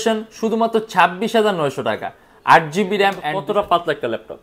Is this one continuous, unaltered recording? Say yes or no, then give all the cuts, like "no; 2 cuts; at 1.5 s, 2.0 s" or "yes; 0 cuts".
no; 1 cut; at 3.3 s